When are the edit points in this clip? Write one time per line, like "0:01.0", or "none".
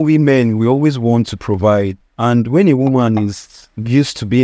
0:02.0